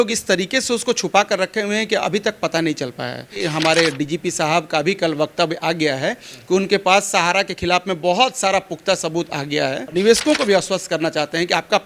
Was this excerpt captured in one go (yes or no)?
no